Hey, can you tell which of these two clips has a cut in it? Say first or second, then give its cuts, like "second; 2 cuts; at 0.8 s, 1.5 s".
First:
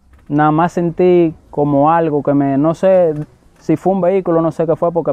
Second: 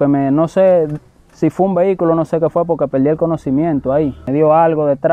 second; 1 cut; at 4.2 s